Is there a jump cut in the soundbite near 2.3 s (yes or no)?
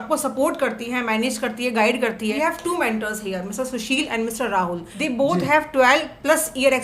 yes